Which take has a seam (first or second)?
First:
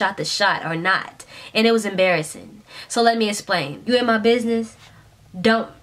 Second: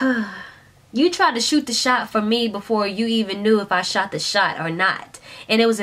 first